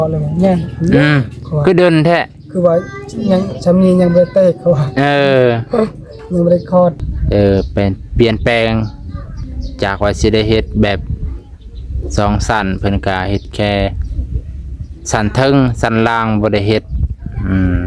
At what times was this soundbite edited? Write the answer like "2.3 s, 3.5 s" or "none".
7.1 s